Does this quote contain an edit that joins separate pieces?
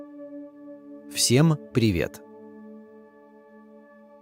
yes; 2 cuts; at 1.3 s, 2.1 s

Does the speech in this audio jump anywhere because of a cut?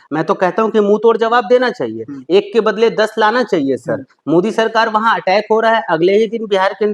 no; 0 cuts

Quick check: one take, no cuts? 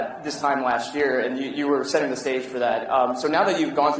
no; 1 cut; at 1.8 s

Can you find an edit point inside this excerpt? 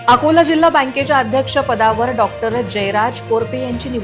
no; 0 cuts

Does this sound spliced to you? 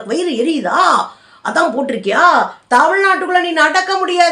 no; 0 cuts

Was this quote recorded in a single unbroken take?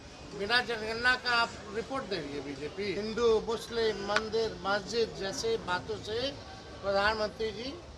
no; 1 cut; at 3.0 s

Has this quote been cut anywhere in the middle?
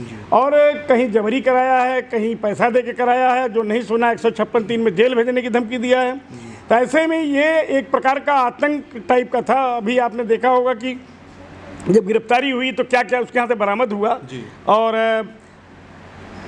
no; 0 cuts

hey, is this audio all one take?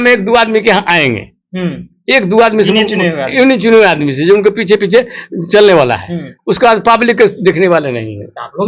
yes; 0 cuts

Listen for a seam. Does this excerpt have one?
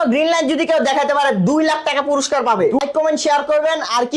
yes; 1 cut; at 2.8 s

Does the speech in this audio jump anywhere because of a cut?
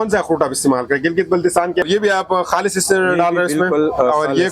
yes; 1 cut; at 1.9 s

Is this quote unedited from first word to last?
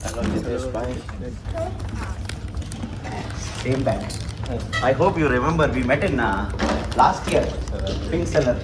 yes; 0 cuts

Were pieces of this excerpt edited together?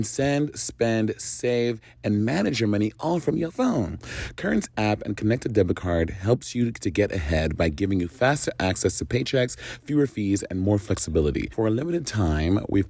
yes; 1 cut; at 11.5 s

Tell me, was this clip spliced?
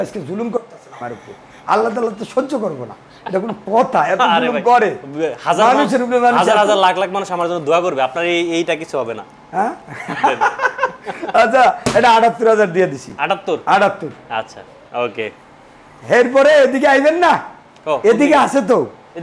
no; 0 cuts

